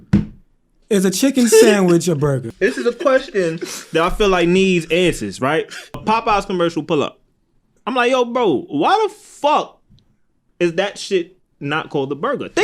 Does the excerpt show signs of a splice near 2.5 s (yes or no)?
yes